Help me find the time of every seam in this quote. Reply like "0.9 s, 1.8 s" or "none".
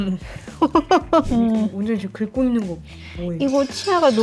1.3 s